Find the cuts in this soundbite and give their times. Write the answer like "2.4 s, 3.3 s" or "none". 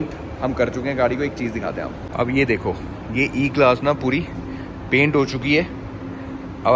none